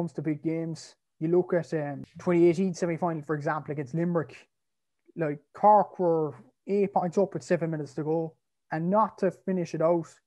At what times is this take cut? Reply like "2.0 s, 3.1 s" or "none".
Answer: 2.1 s